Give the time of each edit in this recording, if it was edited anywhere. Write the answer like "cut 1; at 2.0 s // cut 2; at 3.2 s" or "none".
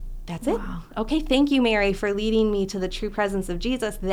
none